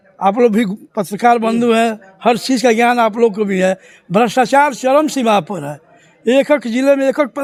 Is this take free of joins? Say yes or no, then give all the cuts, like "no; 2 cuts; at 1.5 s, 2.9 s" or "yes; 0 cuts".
yes; 0 cuts